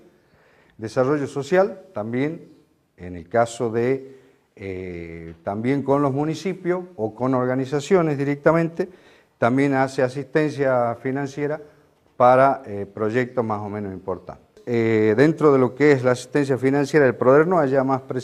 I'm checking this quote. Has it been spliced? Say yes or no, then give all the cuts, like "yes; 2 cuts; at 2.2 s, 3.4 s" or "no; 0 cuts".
yes; 1 cut; at 15.6 s